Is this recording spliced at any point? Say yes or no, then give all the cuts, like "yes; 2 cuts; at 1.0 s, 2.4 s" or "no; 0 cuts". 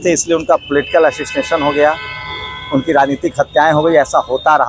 no; 0 cuts